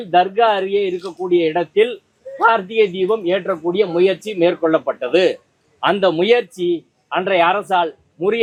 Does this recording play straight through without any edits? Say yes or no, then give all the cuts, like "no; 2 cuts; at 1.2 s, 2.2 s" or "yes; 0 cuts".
yes; 0 cuts